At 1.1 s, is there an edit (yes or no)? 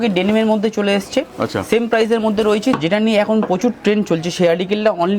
no